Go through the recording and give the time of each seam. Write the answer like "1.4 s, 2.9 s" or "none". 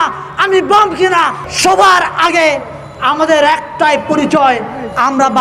1.4 s